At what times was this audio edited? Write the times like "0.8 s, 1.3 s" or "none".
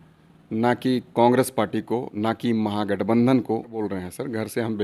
3.9 s